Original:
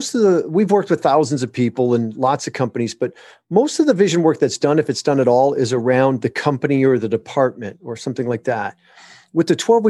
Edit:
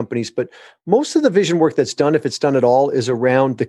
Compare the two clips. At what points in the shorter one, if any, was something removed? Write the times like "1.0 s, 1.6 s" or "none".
none

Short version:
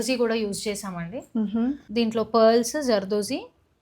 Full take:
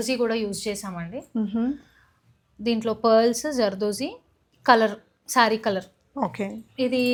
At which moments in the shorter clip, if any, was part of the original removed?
1.8 s

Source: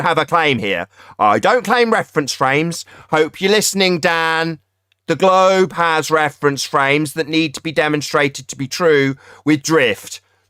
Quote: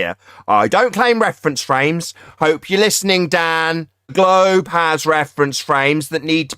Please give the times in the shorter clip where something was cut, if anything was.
4.1 s

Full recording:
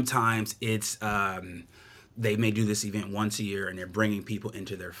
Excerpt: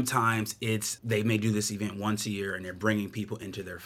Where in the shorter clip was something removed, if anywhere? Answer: 0.9 s

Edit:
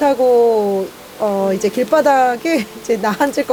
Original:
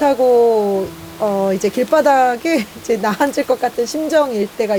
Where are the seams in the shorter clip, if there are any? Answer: none

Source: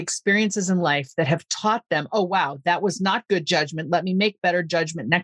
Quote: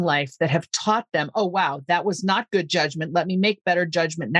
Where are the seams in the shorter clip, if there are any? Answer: none

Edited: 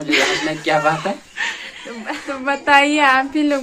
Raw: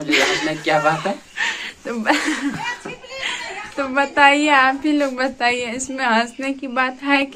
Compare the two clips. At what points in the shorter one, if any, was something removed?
1.9 s

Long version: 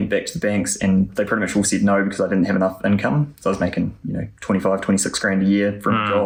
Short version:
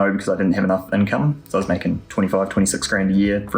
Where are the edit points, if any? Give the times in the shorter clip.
2.0 s

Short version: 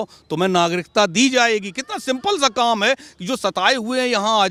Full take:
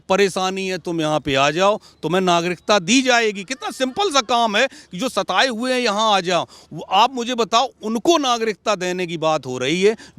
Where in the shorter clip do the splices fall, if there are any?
none

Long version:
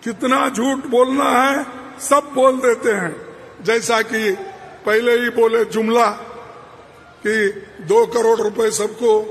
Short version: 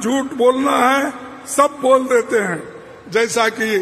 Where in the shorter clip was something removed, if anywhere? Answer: none

